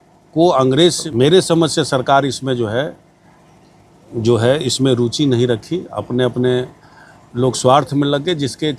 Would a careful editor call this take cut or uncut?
cut